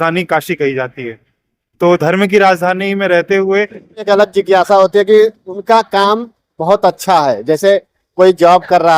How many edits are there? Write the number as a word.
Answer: one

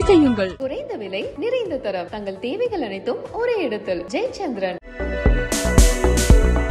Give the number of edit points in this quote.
zero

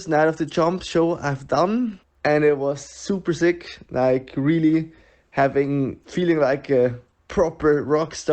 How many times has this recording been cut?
two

